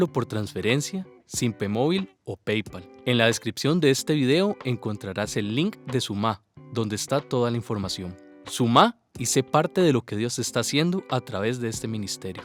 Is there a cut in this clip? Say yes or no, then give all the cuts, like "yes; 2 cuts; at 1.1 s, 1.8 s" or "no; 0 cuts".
no; 0 cuts